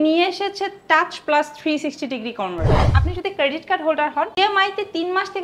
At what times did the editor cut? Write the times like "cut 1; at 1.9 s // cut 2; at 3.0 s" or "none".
cut 1; at 2.9 s // cut 2; at 4.4 s